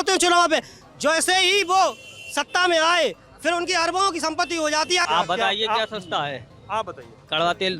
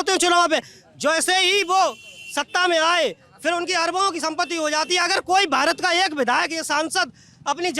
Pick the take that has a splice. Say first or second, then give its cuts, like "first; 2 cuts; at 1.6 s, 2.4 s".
first; 1 cut; at 5.0 s